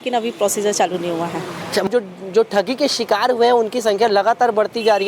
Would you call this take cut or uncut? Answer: cut